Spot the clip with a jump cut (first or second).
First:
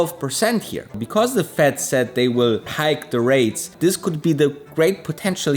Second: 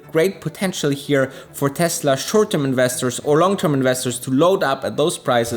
first